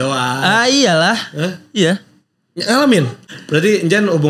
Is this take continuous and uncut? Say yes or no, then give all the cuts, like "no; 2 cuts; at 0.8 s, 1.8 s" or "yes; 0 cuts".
no; 1 cut; at 3.2 s